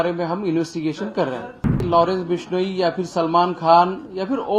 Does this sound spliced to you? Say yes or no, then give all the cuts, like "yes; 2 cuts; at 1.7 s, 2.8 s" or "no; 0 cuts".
yes; 1 cut; at 1.8 s